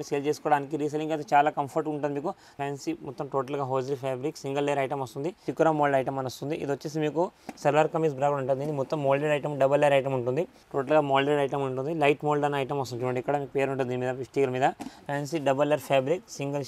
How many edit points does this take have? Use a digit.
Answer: 4